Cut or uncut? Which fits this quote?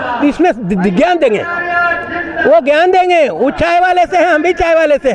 uncut